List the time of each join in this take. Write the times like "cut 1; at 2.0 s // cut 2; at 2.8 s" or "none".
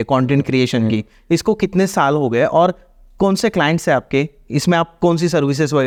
none